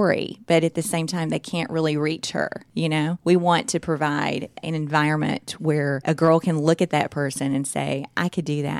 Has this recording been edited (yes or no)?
yes